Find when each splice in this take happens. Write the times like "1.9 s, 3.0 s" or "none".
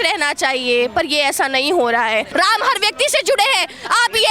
2.3 s